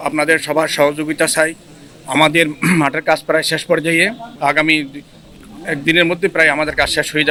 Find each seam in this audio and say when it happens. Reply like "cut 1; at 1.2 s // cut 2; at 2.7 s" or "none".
none